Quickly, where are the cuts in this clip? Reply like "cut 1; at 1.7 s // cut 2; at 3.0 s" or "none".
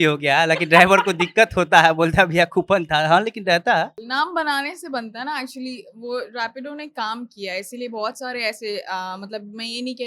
cut 1; at 4.0 s